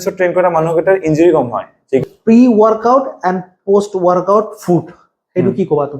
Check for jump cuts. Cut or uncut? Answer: cut